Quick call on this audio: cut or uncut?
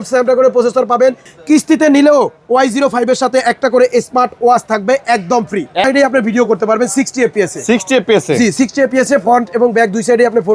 cut